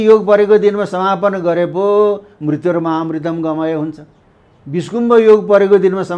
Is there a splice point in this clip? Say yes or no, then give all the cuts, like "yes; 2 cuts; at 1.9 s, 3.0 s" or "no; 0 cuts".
no; 0 cuts